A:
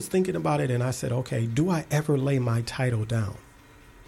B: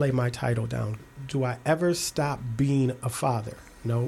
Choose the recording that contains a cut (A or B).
B